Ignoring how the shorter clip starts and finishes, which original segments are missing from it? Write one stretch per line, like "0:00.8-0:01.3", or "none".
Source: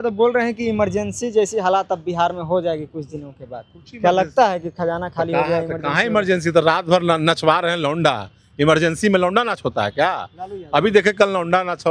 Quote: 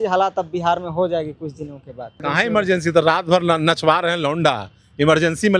0:03.7-0:05.8